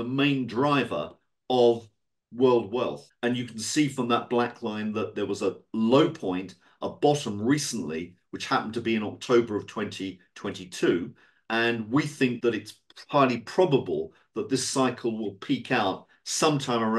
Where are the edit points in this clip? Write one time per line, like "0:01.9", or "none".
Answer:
0:03.0
0:12.4